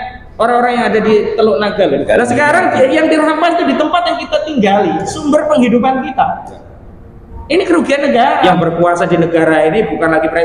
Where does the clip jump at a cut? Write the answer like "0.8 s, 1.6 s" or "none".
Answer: 2.0 s, 8.5 s

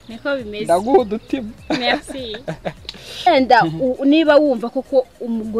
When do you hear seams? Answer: 3.3 s

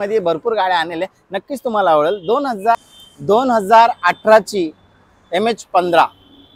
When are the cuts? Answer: 2.8 s

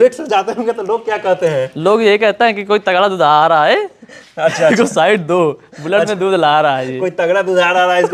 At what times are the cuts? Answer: none

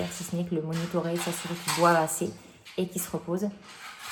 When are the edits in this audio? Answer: none

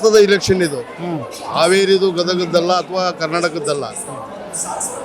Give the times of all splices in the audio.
none

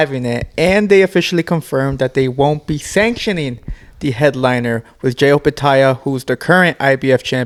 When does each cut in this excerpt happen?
none

